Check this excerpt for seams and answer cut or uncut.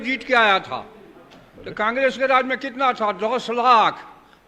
uncut